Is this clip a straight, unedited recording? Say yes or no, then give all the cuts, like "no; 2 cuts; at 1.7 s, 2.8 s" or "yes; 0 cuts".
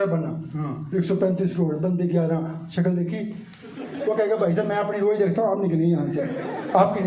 yes; 0 cuts